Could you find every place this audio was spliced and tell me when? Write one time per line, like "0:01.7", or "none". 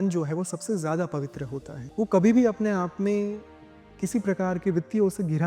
0:01.8